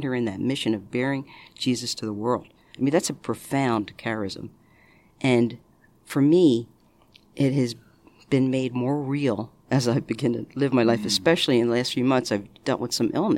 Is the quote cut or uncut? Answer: uncut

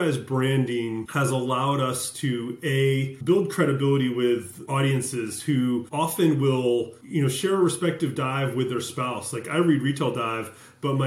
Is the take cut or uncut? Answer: cut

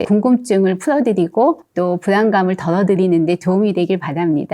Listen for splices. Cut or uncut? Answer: uncut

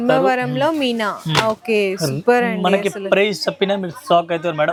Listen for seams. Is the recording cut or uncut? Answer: uncut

